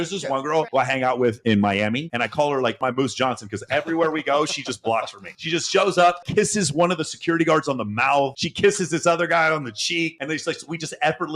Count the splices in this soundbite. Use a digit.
3